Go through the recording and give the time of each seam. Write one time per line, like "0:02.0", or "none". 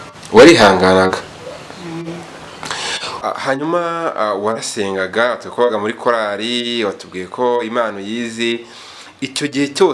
0:03.2